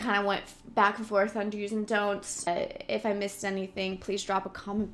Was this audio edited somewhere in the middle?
yes; 1 cut; at 2.5 s

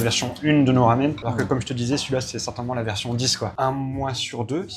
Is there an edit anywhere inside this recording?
yes; 2 cuts; at 1.2 s, 3.5 s

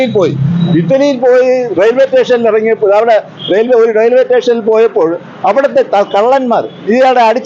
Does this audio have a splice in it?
no; 0 cuts

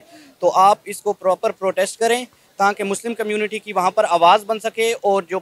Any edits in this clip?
no; 0 cuts

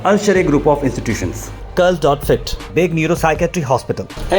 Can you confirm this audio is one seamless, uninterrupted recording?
yes; 0 cuts

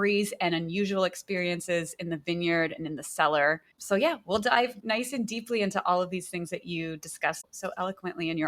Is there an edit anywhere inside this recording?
yes; 1 cut; at 7.5 s

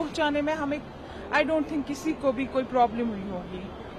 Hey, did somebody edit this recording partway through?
no; 0 cuts

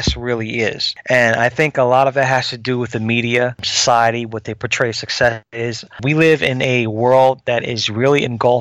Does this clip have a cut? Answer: yes; 3 cuts; at 0.9 s, 3.7 s, 6.0 s

